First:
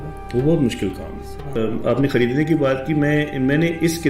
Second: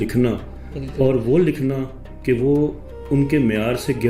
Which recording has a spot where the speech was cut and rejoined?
first; 1 cut; at 1.5 s

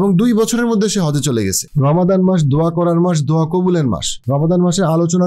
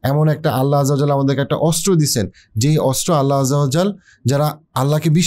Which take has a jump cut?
first; 2 cuts; at 1.6 s, 4.1 s

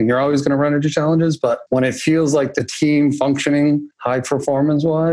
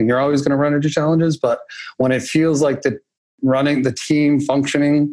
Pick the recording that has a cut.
first; 3 cuts; at 1.6 s, 2.7 s, 3.9 s

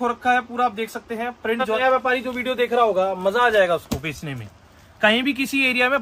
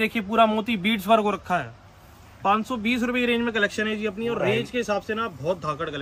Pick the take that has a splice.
first; 1 cut; at 1.8 s

